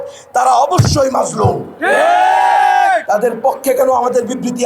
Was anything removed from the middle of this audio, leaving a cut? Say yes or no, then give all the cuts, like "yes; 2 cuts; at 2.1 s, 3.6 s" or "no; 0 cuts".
yes; 1 cut; at 3.0 s